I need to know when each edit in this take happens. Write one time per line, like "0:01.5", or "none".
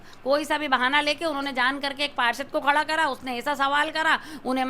none

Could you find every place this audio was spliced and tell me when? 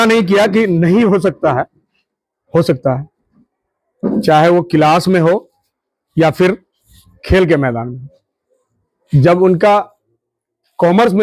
none

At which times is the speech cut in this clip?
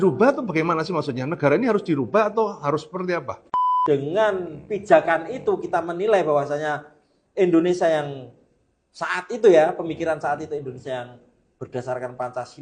0:03.4

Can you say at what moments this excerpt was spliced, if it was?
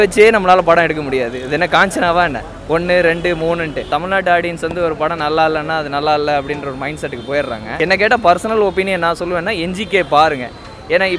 0:03.8
0:07.8

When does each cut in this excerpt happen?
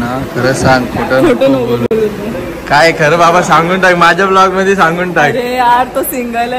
none

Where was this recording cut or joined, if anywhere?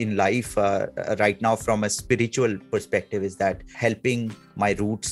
none

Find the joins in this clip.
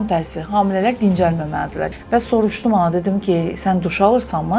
0:01.8

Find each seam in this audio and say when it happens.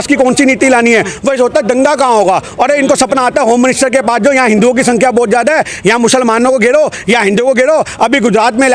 none

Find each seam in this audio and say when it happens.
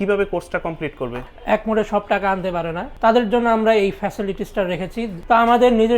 0:01.3
0:02.8
0:05.2

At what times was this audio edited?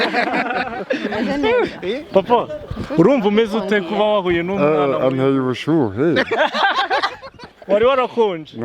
0:07.6

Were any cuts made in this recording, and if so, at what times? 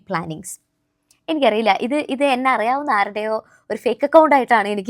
none

